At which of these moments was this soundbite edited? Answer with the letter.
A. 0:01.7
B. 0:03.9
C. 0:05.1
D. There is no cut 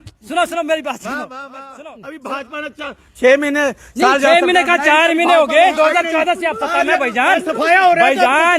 A